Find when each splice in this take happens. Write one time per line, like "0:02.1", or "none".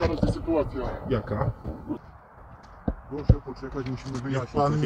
0:02.0